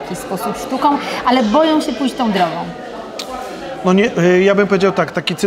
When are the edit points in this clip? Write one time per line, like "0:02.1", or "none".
none